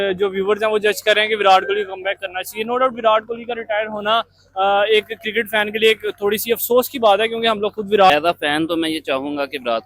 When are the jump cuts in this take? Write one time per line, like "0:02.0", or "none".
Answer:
0:08.1